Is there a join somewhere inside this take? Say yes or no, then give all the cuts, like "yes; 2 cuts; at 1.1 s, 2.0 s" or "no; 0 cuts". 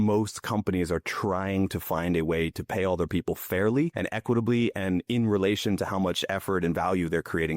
yes; 1 cut; at 4.0 s